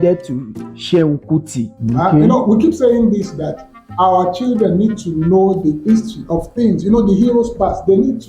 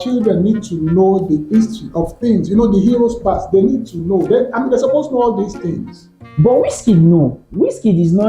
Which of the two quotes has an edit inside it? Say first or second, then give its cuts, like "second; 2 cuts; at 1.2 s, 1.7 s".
first; 1 cut; at 1.7 s